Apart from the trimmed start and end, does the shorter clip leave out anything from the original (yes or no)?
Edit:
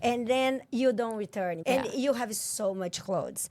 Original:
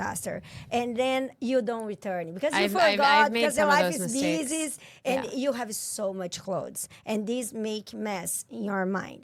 yes